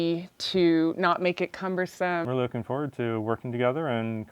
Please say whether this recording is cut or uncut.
cut